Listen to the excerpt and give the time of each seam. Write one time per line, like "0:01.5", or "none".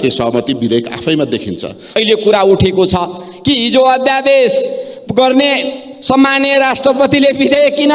0:01.8